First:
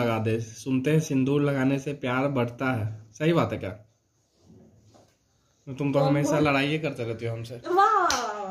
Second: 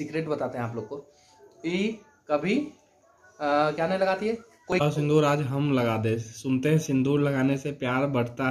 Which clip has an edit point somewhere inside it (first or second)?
second